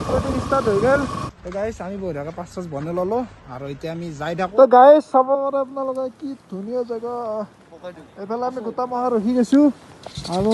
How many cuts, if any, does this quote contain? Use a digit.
2